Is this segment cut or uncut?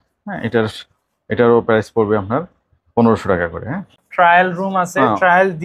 cut